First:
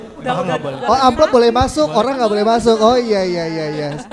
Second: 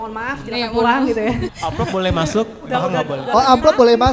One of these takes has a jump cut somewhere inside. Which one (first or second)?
second